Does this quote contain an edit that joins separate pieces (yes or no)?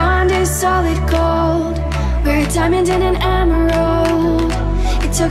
no